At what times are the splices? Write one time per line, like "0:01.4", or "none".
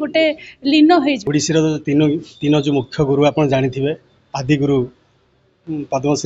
0:01.2